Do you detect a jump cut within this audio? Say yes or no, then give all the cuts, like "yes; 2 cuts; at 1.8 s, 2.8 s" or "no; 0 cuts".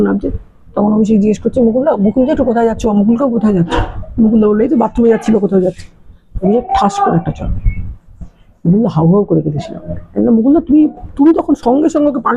no; 0 cuts